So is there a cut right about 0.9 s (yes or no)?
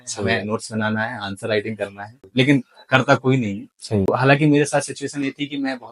no